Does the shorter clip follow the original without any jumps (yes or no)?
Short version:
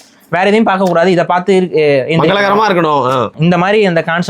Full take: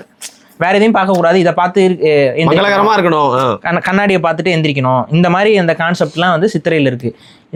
no